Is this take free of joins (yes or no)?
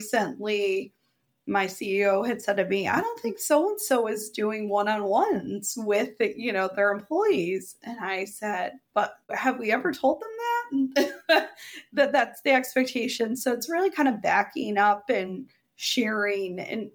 yes